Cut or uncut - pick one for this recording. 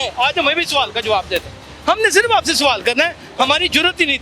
uncut